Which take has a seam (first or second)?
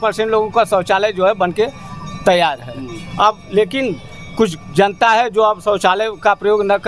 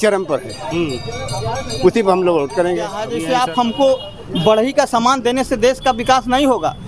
second